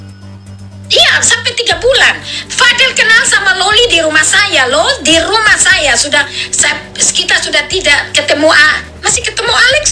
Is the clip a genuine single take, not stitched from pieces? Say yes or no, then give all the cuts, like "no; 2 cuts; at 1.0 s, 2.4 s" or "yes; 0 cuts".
no; 1 cut; at 0.9 s